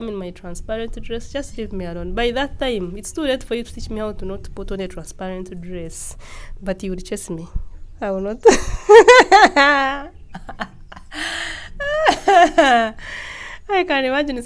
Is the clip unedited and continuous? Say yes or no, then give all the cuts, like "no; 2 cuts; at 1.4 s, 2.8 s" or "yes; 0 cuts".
yes; 0 cuts